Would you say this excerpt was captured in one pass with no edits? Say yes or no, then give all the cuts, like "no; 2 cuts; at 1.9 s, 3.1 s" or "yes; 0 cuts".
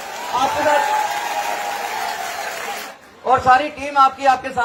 yes; 0 cuts